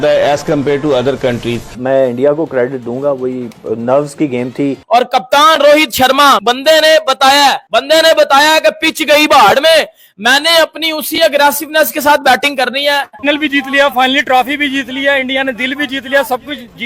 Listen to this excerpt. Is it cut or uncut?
cut